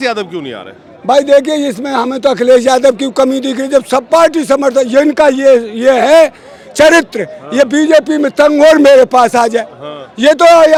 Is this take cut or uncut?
uncut